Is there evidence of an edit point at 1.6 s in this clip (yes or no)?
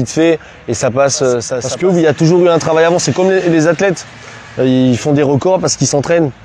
yes